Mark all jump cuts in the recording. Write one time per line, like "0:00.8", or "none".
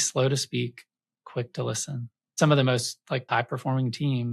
0:02.4
0:03.2